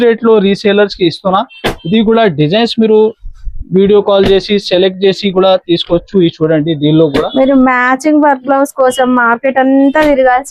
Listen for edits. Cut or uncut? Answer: uncut